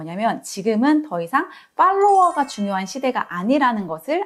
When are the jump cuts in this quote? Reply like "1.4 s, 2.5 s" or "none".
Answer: none